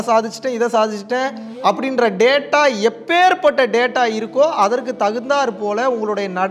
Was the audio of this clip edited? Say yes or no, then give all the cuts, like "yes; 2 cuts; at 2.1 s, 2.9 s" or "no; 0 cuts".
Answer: no; 0 cuts